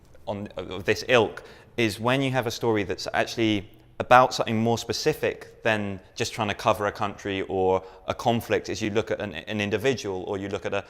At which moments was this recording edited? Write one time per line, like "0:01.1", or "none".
0:06.5